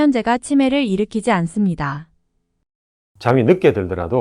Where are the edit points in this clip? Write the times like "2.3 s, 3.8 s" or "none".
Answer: 2.6 s